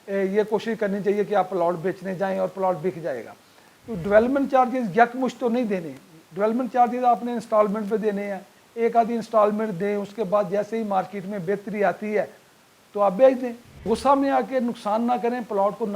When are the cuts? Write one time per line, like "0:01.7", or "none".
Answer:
0:13.8